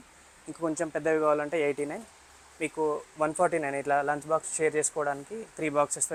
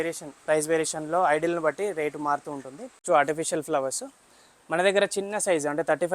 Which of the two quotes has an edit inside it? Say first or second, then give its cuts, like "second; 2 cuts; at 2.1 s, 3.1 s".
second; 1 cut; at 3.0 s